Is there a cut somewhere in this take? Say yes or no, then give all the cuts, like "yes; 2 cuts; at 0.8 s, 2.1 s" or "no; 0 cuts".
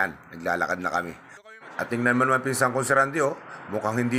no; 0 cuts